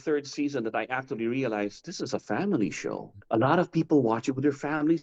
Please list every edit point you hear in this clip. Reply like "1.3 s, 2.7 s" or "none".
3.1 s